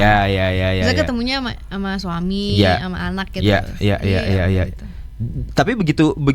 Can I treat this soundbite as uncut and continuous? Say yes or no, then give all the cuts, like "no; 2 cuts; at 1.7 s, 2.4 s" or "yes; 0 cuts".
yes; 0 cuts